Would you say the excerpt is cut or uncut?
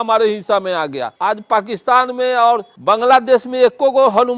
cut